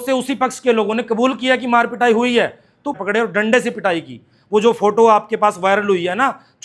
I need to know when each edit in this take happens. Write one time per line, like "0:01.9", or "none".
0:02.9